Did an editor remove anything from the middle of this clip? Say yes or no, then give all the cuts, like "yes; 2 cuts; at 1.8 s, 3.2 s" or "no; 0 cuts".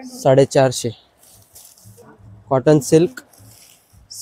yes; 1 cut; at 2.0 s